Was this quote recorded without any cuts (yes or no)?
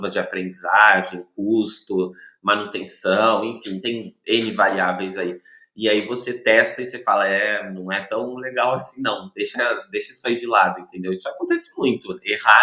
yes